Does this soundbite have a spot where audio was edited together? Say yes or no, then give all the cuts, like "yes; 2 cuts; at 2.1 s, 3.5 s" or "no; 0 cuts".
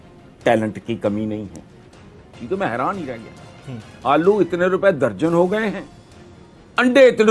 yes; 1 cut; at 2.3 s